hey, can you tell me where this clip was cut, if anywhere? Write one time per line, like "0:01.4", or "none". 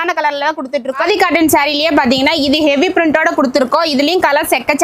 0:01.0